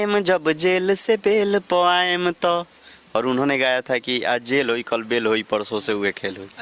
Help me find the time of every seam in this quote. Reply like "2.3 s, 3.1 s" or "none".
none